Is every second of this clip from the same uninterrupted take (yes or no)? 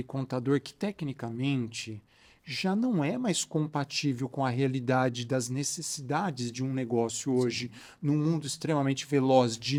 yes